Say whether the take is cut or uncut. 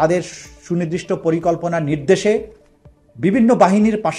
uncut